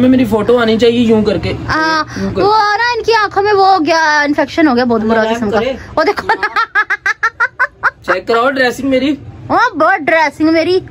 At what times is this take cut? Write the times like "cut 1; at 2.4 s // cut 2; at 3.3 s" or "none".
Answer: cut 1; at 2.1 s // cut 2; at 5.8 s